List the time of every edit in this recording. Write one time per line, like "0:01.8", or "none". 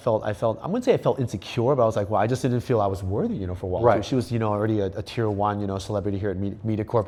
none

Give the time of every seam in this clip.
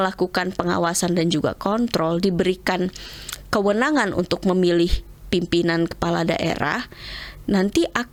none

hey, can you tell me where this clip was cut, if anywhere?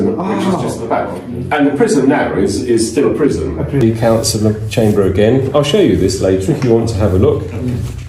0:03.8

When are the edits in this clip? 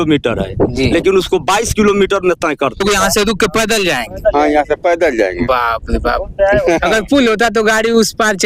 0:02.8

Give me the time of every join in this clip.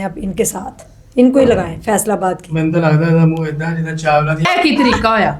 0:04.5

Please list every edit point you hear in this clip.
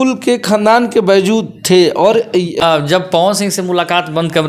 0:02.6

